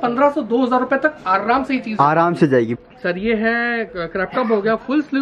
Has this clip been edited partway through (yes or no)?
yes